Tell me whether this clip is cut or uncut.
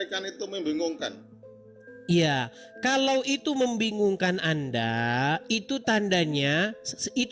uncut